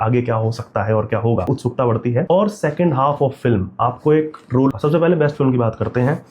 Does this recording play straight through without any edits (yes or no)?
no